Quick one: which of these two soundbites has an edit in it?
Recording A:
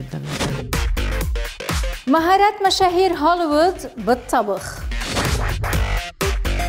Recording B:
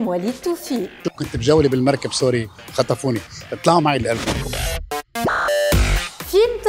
B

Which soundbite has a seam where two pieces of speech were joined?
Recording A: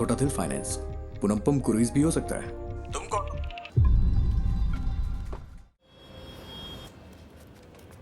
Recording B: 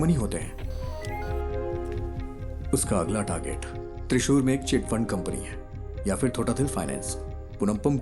A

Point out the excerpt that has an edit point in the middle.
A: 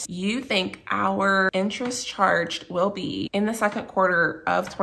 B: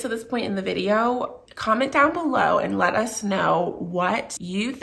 A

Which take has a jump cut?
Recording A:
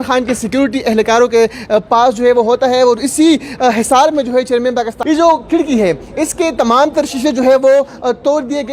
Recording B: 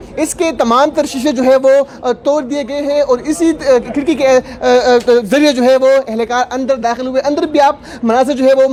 A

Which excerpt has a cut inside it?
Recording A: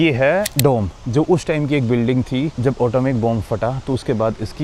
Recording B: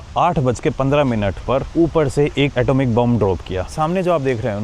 B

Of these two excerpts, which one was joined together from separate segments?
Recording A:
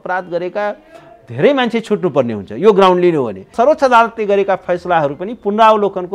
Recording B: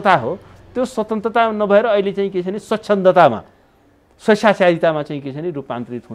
A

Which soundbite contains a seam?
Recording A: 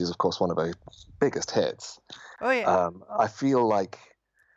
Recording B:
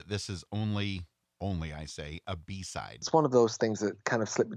B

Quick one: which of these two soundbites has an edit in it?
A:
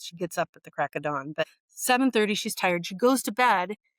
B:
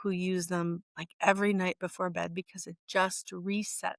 A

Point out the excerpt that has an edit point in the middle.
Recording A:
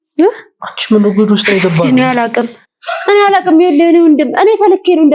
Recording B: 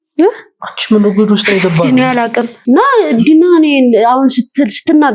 B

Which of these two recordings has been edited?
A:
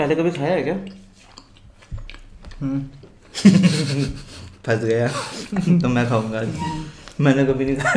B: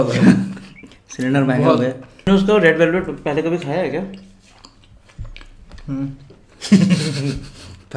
B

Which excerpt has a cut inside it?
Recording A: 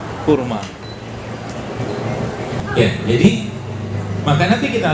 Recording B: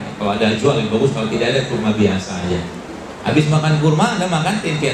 A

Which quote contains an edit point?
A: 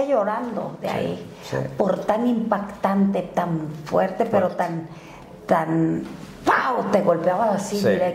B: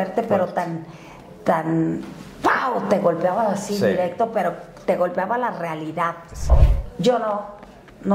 B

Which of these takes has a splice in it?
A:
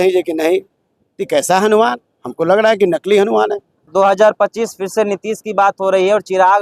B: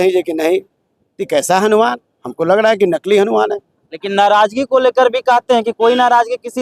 A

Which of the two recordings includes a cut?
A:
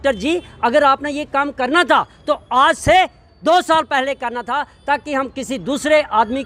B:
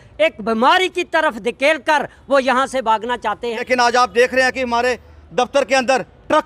B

